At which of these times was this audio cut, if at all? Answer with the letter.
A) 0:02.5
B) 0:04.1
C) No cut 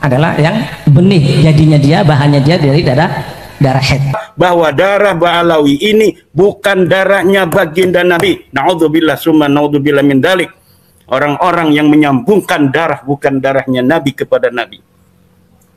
B